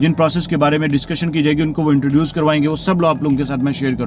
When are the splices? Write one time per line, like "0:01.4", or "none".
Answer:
none